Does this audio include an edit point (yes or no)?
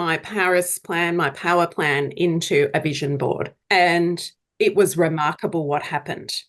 yes